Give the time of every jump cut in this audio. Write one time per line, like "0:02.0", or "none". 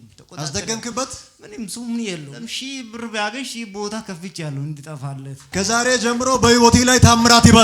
0:02.3
0:05.3